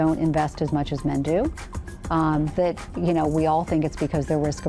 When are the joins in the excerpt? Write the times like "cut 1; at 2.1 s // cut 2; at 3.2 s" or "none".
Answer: none